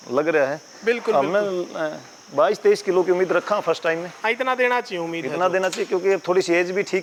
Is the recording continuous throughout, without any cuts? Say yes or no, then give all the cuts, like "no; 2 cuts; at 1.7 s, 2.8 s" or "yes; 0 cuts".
yes; 0 cuts